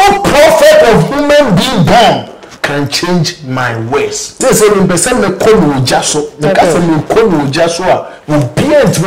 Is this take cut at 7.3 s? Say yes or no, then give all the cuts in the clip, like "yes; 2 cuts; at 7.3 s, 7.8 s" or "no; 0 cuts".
no; 1 cut; at 4.4 s